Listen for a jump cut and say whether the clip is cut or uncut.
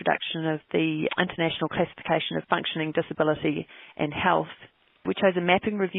cut